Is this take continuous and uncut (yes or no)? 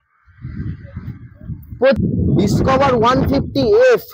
no